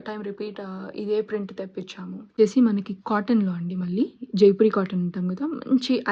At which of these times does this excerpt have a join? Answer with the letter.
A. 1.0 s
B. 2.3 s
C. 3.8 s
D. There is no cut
B